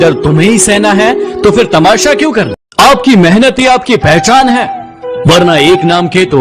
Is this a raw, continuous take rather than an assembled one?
no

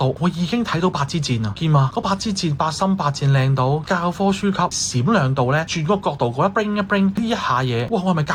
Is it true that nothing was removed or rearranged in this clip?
yes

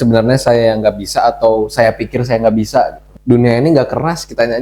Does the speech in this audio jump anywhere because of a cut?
yes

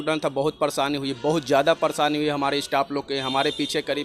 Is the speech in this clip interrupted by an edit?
no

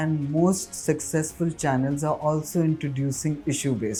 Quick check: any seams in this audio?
no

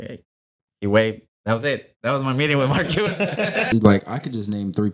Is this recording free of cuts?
no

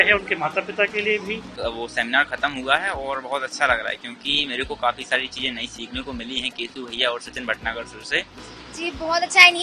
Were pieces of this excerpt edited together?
yes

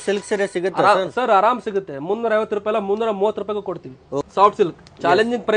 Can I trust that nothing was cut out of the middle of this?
no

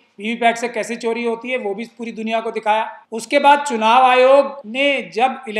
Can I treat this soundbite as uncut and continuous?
no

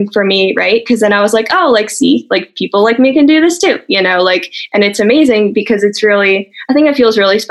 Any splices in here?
no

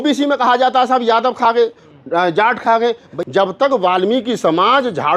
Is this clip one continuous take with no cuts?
no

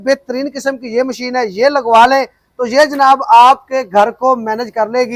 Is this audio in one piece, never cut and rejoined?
yes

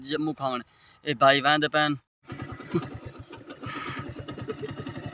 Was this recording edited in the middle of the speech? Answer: yes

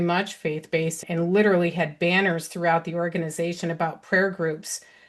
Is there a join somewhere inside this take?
yes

